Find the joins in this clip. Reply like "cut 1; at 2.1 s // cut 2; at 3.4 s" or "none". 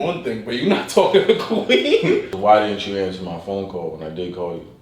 cut 1; at 2.3 s

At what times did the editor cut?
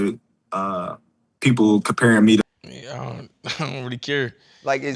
cut 1; at 2.5 s

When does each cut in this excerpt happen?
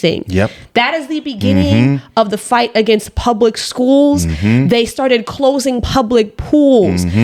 none

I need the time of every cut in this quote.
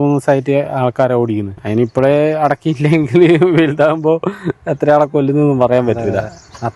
cut 1; at 1.6 s

